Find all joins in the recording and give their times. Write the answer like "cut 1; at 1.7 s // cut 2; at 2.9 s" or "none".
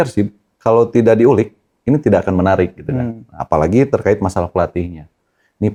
none